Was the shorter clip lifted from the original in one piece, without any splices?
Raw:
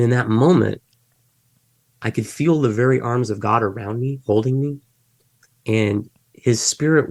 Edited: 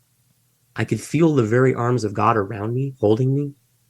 yes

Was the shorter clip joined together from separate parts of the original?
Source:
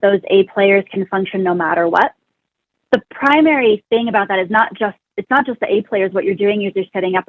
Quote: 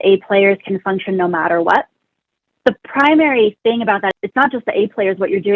yes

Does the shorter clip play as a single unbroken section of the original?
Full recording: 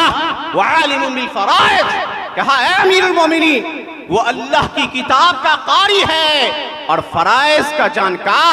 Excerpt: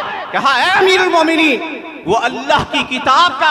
yes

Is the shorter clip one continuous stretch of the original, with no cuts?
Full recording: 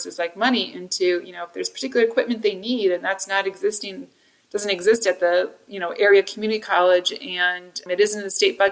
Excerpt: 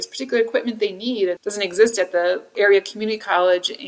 no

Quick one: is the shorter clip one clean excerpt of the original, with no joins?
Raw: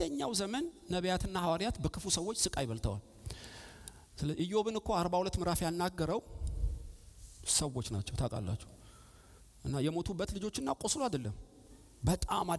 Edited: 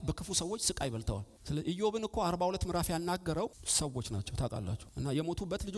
no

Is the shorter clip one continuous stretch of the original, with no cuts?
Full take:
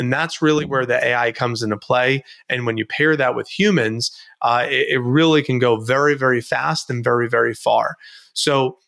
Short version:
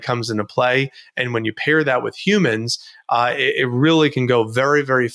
yes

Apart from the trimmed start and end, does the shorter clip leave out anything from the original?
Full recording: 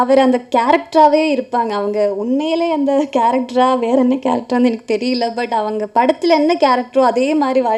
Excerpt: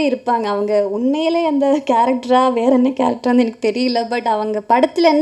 no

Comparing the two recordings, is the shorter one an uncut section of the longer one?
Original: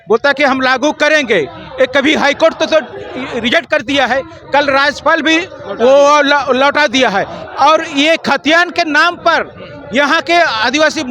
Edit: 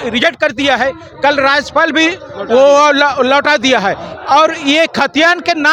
yes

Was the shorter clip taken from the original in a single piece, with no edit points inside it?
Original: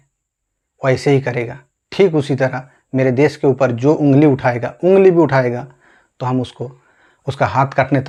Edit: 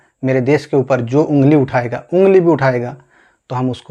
yes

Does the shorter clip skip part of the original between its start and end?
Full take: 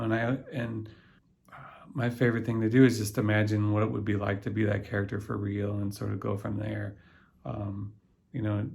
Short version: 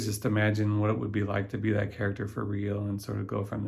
no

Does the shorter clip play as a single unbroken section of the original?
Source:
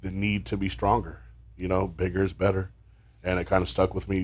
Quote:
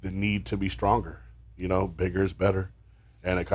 yes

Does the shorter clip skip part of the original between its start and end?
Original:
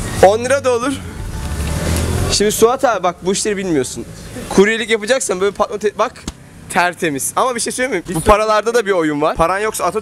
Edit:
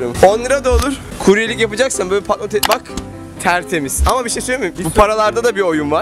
yes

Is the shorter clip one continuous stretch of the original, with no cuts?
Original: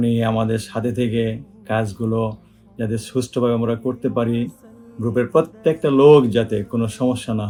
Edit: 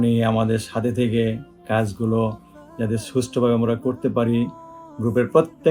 yes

